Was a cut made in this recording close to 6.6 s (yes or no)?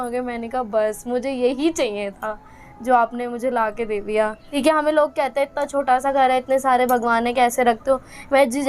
no